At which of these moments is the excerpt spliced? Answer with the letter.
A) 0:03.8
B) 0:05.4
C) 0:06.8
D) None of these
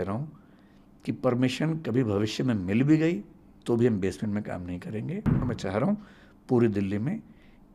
B